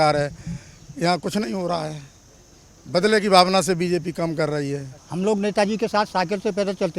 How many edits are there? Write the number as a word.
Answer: one